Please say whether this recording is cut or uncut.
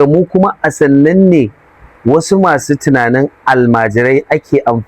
uncut